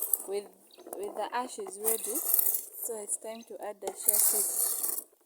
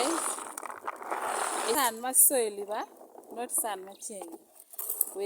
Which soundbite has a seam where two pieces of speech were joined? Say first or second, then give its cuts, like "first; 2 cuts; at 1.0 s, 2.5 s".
second; 1 cut; at 1.8 s